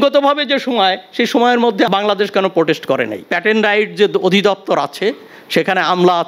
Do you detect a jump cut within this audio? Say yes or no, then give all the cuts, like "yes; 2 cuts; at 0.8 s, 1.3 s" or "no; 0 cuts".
yes; 2 cuts; at 1.9 s, 3.2 s